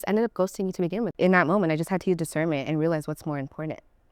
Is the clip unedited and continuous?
no; 1 cut; at 1.1 s

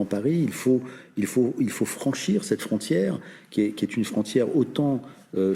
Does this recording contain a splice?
no; 0 cuts

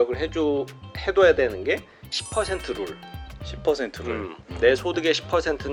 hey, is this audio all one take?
yes; 0 cuts

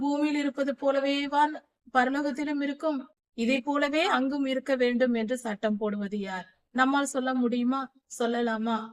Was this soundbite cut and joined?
yes; 2 cuts; at 3.2 s, 4.1 s

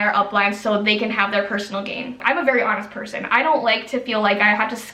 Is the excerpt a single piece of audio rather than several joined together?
no; 1 cut; at 2.2 s

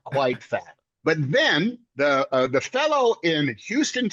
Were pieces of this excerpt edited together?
no; 0 cuts

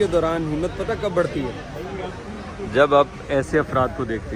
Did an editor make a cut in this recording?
no; 0 cuts

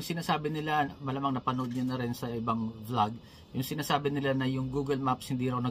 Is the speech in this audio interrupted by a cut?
no; 0 cuts

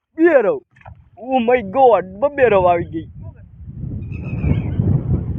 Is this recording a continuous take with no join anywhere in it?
yes; 0 cuts

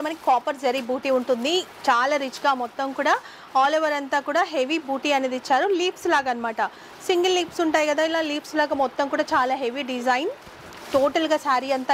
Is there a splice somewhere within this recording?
no; 0 cuts

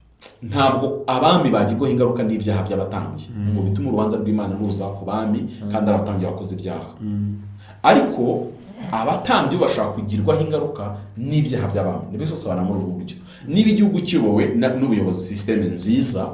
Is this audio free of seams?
yes; 0 cuts

